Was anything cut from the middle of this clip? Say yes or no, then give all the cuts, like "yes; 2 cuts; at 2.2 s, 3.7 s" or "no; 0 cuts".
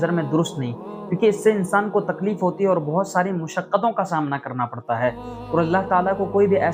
no; 0 cuts